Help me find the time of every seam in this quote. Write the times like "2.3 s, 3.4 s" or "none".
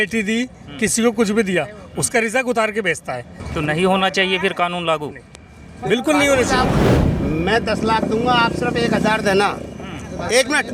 3.4 s, 6.8 s